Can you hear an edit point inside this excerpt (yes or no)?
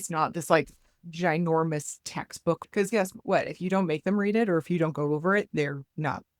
yes